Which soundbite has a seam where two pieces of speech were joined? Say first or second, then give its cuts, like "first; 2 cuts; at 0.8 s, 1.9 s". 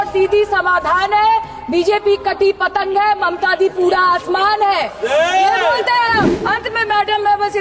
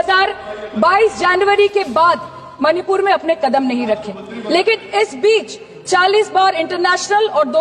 first; 1 cut; at 6.4 s